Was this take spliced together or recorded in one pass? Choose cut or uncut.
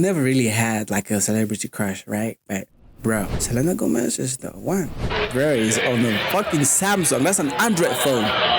cut